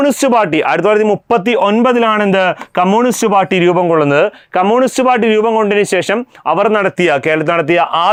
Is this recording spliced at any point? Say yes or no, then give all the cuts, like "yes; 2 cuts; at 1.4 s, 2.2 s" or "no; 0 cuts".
no; 0 cuts